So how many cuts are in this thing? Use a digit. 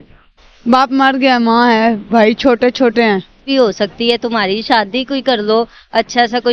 1